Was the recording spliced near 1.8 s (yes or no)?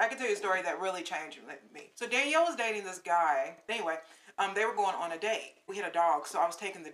yes